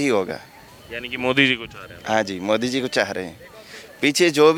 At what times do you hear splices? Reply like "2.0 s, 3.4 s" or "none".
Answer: none